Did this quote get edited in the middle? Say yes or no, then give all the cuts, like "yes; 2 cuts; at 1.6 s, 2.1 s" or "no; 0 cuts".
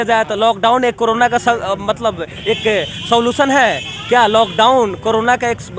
no; 0 cuts